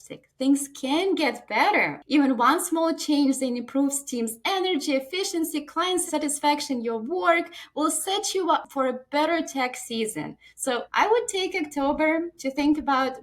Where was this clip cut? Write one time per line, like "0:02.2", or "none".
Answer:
0:02.0
0:06.0
0:08.7
0:10.9